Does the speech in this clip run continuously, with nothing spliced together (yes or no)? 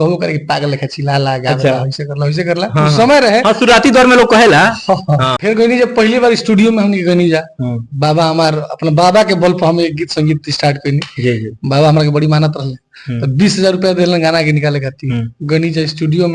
no